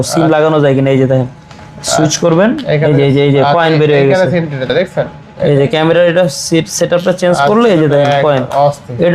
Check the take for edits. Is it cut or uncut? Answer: cut